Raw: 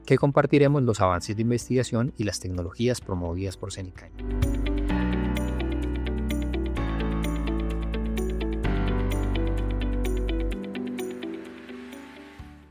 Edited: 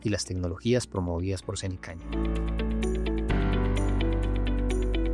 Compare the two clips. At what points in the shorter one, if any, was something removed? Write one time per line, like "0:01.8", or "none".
0:02.1

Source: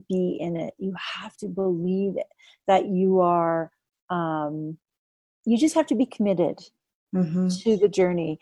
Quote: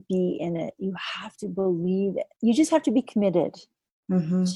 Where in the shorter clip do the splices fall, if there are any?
0:02.3

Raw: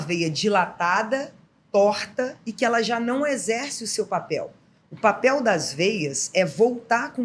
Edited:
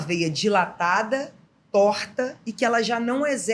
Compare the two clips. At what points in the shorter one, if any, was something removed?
none

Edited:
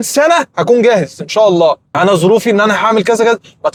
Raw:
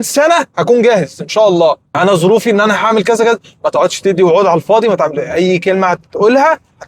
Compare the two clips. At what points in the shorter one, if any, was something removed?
none

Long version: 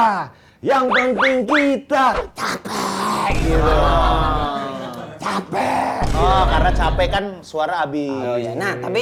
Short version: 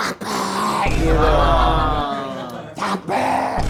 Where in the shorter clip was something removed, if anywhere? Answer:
none

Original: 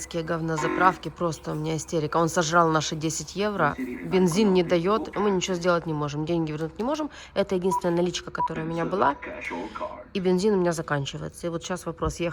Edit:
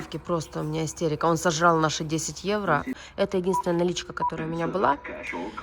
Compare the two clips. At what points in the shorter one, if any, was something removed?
0:03.0

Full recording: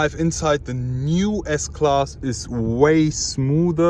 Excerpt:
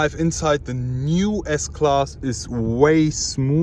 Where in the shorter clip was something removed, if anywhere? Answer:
none

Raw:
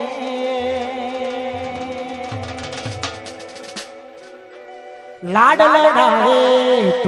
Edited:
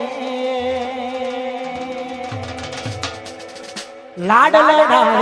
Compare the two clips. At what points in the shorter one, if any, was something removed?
0:04.1

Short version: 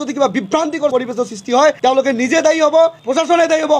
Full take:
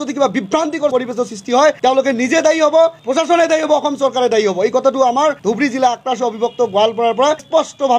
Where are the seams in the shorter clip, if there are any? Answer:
none

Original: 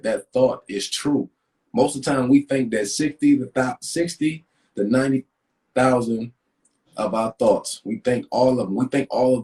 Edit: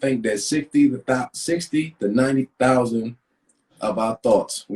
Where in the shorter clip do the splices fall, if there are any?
0:02.2

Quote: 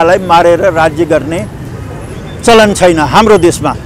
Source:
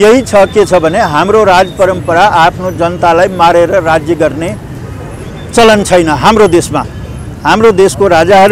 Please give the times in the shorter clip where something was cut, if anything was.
none

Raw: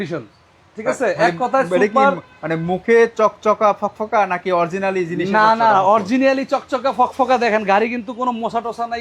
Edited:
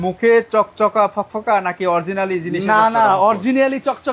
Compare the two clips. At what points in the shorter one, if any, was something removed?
none

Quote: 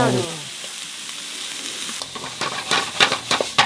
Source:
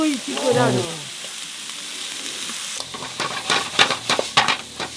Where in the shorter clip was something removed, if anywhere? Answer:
0:02.0

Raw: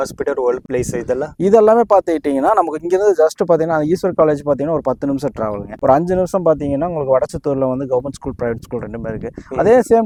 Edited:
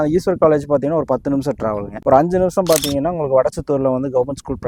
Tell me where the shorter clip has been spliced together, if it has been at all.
none

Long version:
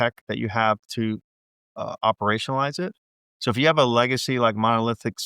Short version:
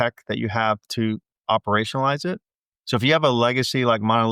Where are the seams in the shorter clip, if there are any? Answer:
0:01.3

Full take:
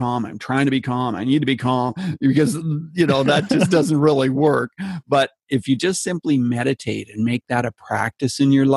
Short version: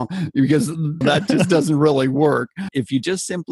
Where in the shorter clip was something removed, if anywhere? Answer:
0:01.0
0:02.6

